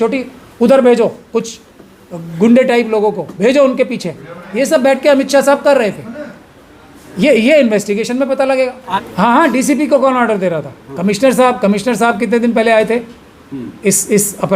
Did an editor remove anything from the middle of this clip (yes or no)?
yes